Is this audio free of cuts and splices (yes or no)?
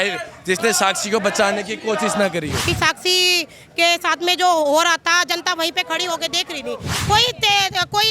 no